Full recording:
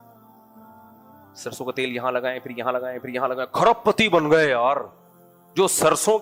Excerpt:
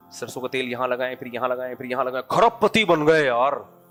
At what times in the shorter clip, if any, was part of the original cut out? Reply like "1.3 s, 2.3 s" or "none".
none